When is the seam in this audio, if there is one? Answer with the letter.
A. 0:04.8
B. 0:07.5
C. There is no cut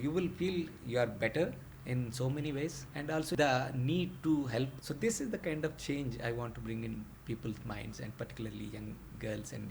A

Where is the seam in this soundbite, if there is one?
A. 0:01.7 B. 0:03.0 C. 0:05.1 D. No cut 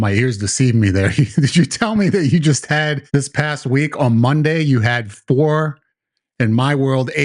B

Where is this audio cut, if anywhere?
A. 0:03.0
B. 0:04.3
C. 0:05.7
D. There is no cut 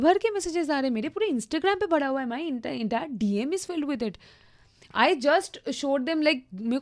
D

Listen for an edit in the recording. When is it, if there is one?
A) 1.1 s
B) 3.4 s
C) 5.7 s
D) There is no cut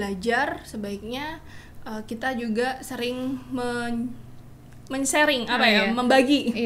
D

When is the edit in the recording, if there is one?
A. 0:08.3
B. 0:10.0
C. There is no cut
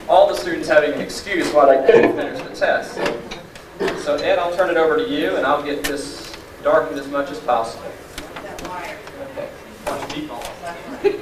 A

